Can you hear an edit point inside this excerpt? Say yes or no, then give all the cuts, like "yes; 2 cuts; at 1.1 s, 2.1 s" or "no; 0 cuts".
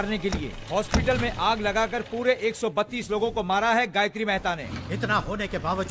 yes; 1 cut; at 4.6 s